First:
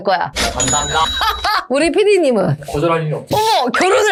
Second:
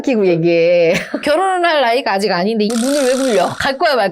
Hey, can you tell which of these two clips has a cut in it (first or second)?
second